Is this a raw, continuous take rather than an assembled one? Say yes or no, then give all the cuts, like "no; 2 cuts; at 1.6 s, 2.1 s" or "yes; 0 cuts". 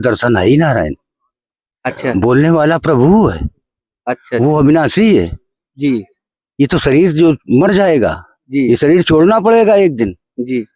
yes; 0 cuts